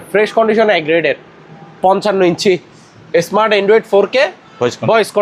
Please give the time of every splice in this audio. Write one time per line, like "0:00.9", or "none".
none